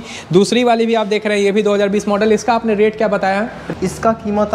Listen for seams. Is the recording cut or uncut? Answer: cut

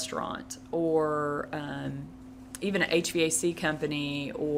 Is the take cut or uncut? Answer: uncut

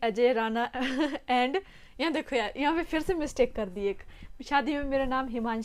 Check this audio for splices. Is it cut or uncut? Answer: uncut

